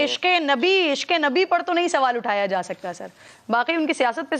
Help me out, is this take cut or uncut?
uncut